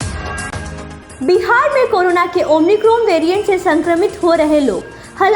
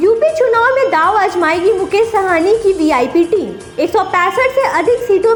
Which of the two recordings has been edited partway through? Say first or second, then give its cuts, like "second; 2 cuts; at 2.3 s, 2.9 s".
first; 1 cut; at 1.0 s